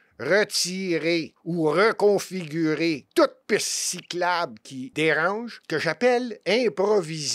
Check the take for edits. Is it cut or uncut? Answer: cut